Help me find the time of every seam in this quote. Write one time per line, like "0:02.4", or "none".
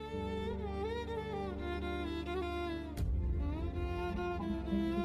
none